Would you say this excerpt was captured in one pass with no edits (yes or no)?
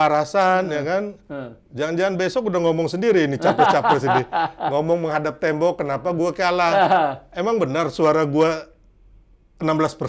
yes